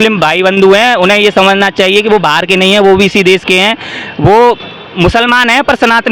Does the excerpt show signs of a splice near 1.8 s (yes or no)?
no